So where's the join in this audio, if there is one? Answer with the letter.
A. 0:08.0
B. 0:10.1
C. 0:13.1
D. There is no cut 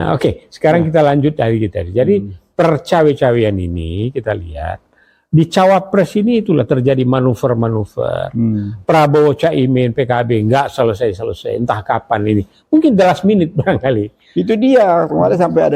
D